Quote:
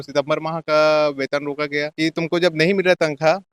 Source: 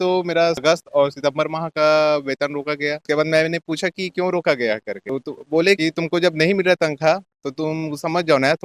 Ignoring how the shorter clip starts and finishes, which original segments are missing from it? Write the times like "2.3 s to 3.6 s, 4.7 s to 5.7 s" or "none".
3.1 s to 5.8 s